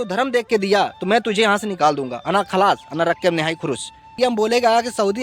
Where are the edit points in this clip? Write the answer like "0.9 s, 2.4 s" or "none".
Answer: 4.1 s